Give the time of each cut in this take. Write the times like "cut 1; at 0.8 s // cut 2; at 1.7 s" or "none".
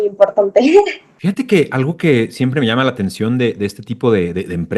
cut 1; at 1.1 s